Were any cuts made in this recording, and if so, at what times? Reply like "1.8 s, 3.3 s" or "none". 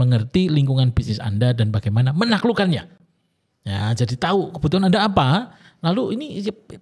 none